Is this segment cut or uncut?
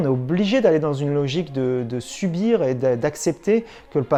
uncut